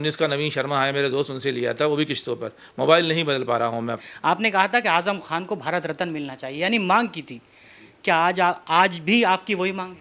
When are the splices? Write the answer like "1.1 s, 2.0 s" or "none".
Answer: 4.0 s